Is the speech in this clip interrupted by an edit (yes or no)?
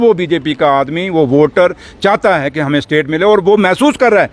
no